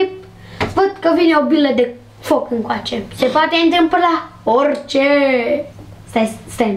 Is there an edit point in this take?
yes; 1 cut; at 5.8 s

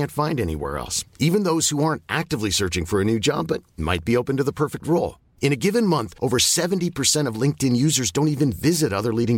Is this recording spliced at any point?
no; 0 cuts

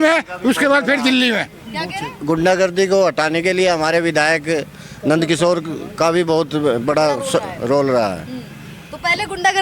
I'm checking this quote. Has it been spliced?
no; 0 cuts

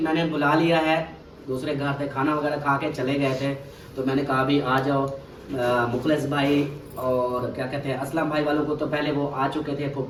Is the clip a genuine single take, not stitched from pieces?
yes; 0 cuts

